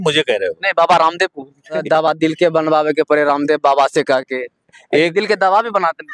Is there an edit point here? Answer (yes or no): yes